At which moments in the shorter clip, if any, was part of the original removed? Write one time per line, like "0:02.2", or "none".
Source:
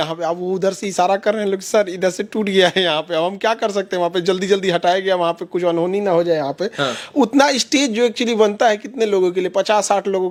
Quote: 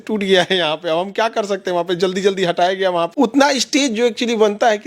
0:03.1